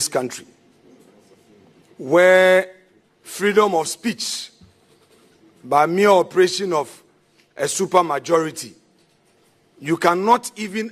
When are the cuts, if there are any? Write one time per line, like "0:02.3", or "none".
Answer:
none

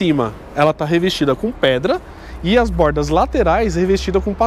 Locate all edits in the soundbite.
none

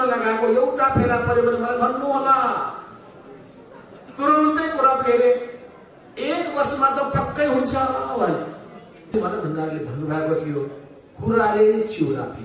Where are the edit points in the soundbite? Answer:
0:09.1

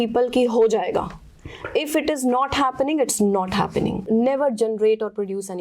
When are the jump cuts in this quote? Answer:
0:04.0

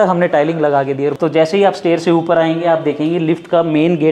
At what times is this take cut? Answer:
0:01.2

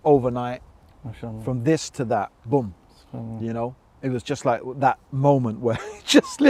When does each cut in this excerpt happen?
none

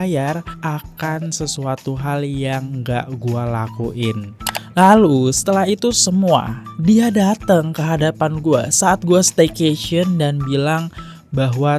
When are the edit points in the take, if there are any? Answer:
0:04.3

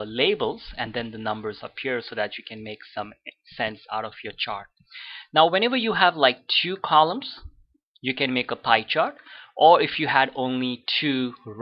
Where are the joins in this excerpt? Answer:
0:02.7

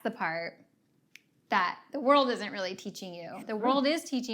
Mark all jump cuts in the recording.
0:03.4

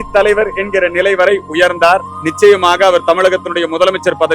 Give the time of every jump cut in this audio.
0:02.2

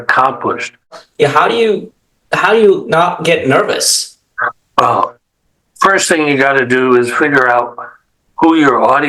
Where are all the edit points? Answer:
0:01.0

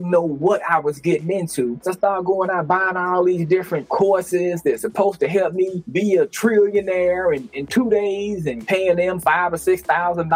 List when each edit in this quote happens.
0:01.8

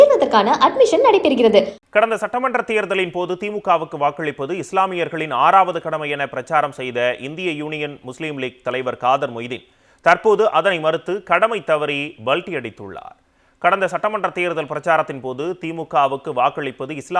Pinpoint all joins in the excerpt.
0:01.8

